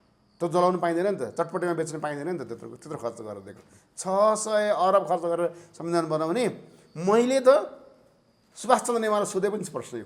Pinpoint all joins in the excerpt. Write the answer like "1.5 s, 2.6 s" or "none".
none

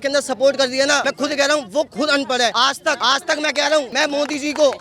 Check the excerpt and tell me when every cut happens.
1.0 s, 2.7 s, 3.9 s

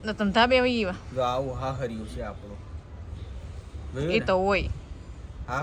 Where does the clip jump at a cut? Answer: none

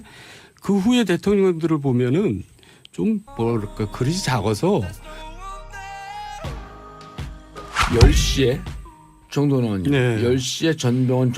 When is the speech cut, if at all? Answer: 4.9 s

